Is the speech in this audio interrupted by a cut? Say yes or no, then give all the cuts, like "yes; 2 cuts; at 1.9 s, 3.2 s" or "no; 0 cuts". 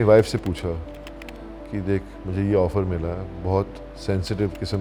no; 0 cuts